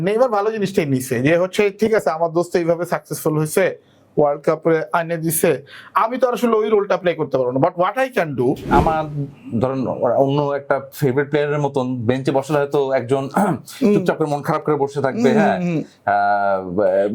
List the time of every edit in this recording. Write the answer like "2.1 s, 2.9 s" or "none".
8.6 s